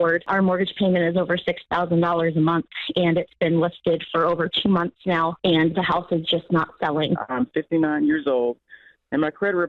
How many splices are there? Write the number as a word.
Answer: one